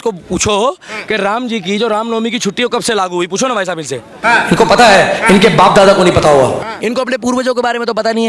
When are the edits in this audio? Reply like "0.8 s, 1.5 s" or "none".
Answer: none